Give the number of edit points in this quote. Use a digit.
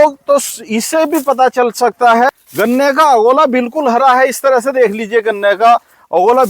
1